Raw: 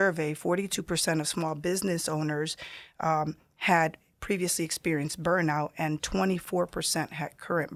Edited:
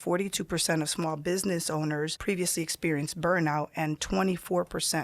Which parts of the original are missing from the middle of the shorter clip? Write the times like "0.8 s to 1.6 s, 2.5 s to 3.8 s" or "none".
2.5 s to 4.2 s